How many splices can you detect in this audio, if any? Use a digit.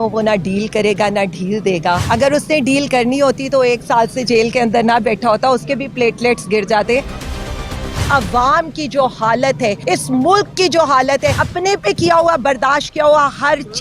4